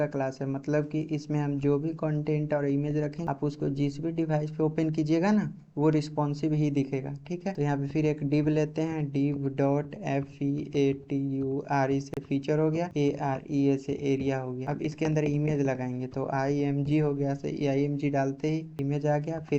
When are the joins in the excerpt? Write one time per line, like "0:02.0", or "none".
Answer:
0:03.2
0:07.5
0:12.9
0:14.6